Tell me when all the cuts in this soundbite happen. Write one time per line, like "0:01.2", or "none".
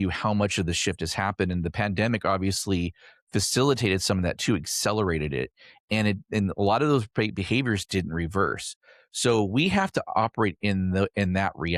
none